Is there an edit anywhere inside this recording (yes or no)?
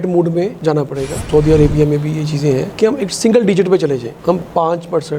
yes